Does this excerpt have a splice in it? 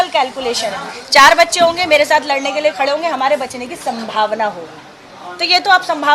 no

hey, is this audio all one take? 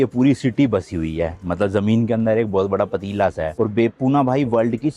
yes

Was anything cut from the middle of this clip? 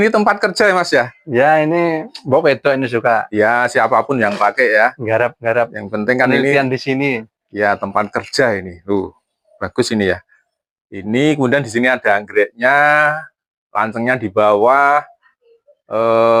no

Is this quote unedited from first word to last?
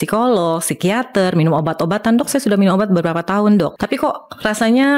no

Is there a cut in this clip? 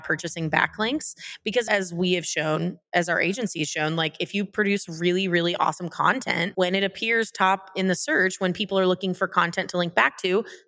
no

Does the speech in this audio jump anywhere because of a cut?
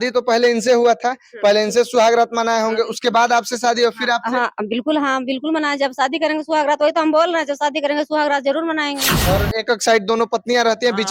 yes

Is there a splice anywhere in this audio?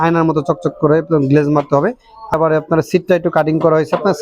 yes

